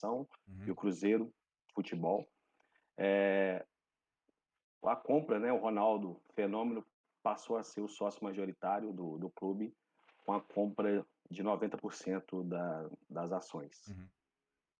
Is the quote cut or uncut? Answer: uncut